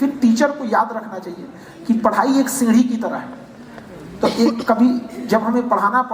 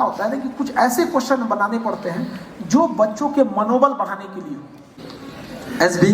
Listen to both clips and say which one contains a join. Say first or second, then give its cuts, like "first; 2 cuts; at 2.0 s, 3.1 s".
second; 1 cut; at 4.9 s